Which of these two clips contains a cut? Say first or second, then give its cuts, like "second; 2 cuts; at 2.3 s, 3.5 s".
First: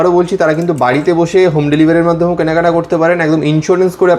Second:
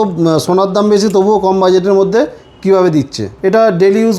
second; 1 cut; at 3.2 s